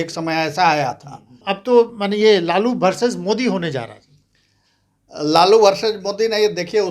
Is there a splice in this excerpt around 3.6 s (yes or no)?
no